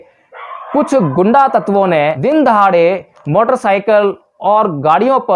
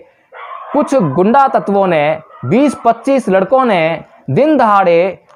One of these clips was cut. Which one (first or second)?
first